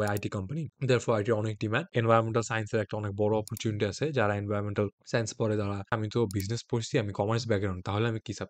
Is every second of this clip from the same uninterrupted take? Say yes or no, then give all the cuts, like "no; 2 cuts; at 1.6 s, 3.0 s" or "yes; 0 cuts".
no; 2 cuts; at 1.9 s, 5.9 s